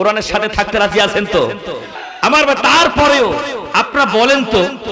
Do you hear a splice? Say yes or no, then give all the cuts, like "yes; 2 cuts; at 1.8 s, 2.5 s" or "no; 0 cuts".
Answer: yes; 1 cut; at 1.8 s